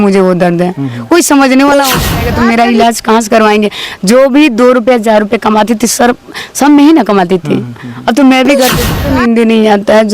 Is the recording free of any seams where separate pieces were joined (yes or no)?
no